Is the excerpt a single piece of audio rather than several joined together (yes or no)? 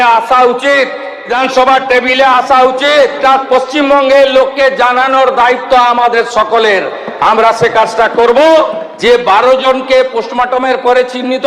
no